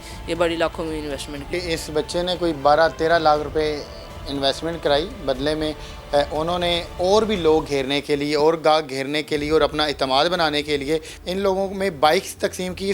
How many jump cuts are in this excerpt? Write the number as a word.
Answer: two